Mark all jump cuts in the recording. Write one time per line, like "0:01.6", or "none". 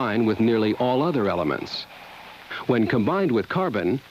0:01.3